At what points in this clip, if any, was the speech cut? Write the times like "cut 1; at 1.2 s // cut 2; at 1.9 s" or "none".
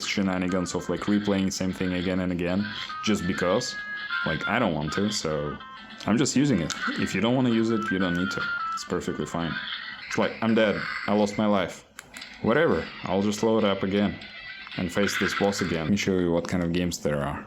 cut 1; at 10.0 s // cut 2; at 15.9 s